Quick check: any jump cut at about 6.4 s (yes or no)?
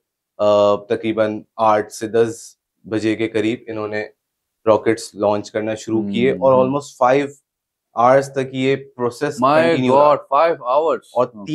no